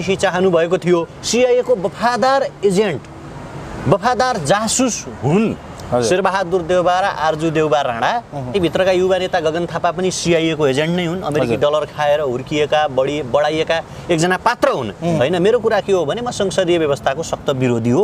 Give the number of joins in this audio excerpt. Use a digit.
3